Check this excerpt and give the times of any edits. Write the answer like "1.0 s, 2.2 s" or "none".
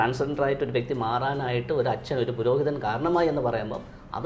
none